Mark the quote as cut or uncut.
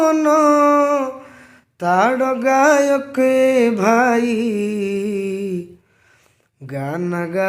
uncut